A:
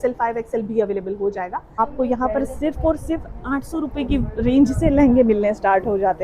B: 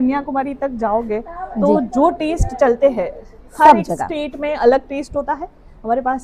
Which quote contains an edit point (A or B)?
A